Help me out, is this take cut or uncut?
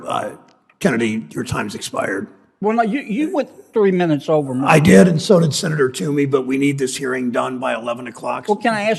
uncut